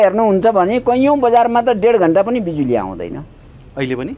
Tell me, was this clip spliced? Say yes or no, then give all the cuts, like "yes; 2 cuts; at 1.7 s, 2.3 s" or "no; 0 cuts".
no; 0 cuts